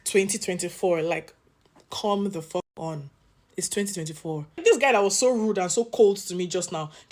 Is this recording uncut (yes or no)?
no